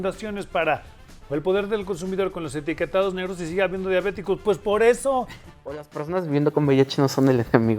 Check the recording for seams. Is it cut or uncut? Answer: cut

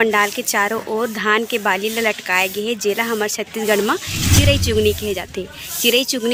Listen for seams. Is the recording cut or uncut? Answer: uncut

